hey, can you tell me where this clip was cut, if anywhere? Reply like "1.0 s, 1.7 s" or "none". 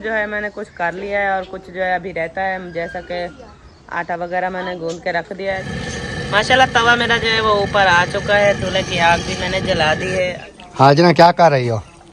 5.6 s, 10.4 s